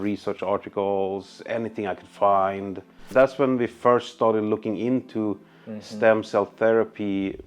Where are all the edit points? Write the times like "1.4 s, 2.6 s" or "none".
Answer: 3.0 s